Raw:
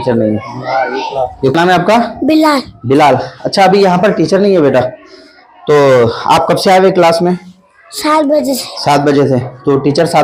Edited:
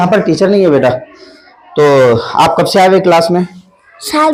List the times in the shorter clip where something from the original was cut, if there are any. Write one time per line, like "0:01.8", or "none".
none